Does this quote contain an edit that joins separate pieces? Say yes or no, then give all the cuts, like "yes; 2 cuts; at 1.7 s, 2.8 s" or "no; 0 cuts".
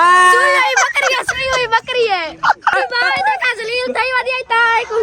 yes; 1 cut; at 2.7 s